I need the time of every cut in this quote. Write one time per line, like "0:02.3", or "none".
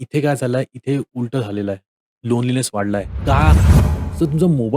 0:03.7